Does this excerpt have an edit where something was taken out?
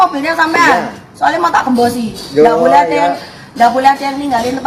no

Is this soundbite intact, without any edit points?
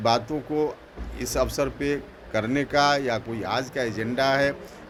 yes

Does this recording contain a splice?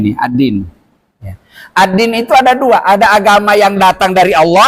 no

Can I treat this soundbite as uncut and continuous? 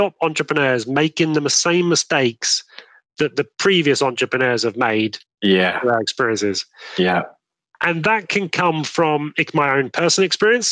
yes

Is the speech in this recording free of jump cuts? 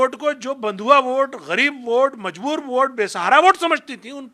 yes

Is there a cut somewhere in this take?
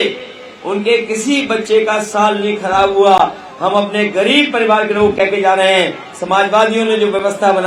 no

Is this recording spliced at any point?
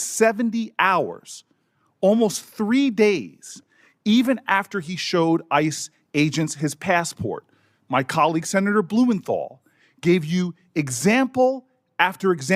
no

